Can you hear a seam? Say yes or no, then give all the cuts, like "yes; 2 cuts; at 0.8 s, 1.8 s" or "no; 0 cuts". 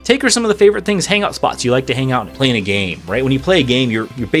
yes; 1 cut; at 2.3 s